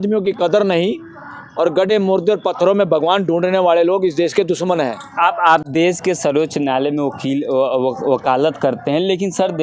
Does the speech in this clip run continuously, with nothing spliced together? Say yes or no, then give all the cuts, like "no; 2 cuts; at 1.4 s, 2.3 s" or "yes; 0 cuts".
yes; 0 cuts